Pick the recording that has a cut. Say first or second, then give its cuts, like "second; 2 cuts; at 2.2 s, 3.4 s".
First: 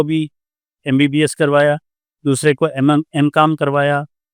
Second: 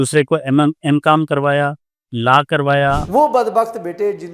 second; 1 cut; at 3.0 s